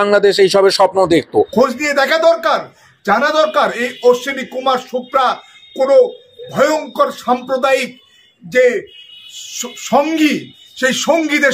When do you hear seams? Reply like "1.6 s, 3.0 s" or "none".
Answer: 1.5 s